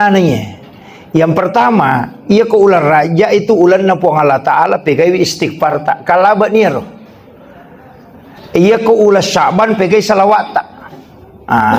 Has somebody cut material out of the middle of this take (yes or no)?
no